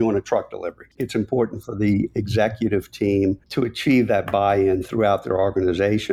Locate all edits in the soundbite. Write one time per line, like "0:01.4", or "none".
0:01.0
0:03.4